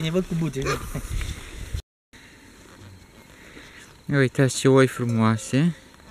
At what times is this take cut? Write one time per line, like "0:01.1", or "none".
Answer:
0:02.1